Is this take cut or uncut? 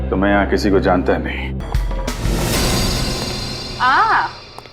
cut